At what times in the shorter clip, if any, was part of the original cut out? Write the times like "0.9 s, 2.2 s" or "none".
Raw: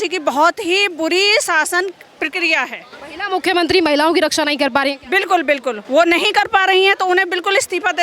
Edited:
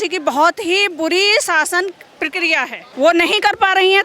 2.9 s